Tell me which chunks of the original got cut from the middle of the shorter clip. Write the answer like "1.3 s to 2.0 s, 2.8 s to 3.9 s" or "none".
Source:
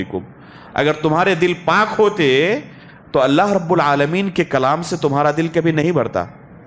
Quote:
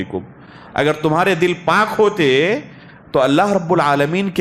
none